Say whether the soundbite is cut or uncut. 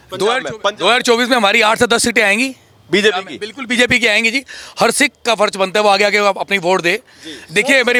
uncut